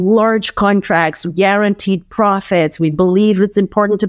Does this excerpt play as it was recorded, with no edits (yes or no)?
yes